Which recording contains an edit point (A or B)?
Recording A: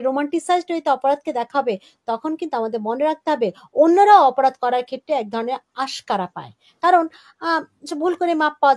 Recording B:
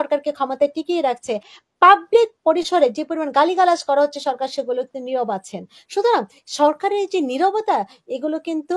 B